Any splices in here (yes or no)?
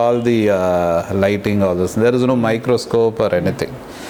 no